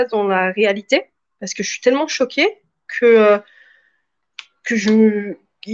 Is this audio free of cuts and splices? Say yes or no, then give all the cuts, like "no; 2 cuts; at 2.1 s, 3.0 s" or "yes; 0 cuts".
yes; 0 cuts